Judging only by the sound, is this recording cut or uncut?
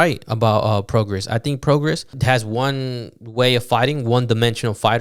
cut